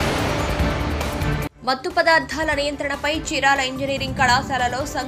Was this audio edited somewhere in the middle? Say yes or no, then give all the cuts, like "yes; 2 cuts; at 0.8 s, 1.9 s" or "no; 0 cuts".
no; 0 cuts